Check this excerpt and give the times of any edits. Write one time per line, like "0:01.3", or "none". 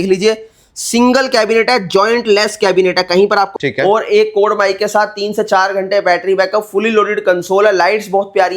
0:03.5